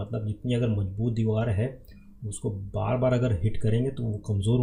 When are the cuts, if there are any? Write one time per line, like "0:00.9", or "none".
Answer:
none

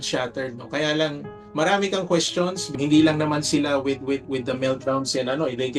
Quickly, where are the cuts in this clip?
0:01.4
0:02.7

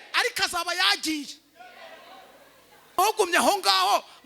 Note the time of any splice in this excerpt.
0:03.0

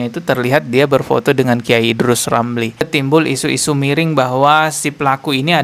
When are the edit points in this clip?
0:02.9

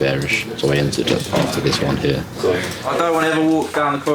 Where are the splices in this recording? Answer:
0:02.8

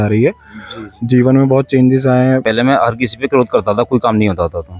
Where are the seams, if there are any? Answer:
0:02.4

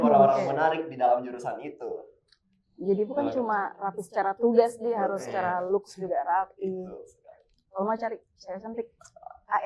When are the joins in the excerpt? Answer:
none

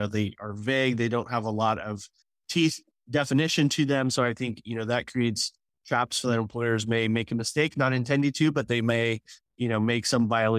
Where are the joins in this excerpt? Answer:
none

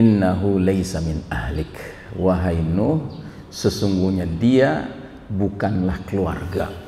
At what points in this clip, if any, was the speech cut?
none

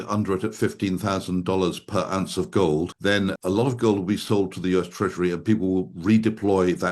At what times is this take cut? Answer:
0:03.1

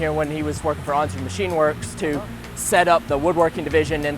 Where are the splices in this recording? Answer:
0:03.0

